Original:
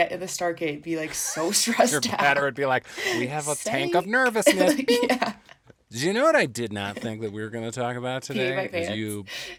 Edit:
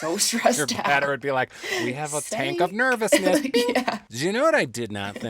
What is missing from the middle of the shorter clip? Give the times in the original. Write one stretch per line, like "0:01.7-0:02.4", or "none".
0:05.4-0:05.9